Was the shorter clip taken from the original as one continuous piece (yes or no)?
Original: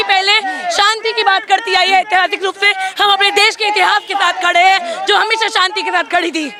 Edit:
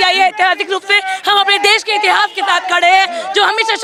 yes